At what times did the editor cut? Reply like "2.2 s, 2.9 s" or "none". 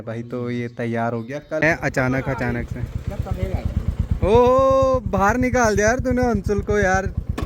1.6 s